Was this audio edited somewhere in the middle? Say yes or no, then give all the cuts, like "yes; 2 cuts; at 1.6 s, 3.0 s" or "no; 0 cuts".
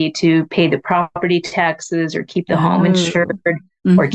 no; 0 cuts